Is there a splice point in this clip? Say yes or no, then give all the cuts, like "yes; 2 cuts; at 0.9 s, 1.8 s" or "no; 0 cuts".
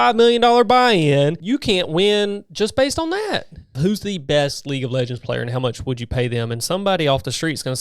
yes; 2 cuts; at 1.4 s, 3.8 s